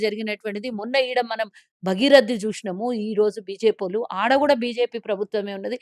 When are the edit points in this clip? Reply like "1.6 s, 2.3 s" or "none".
none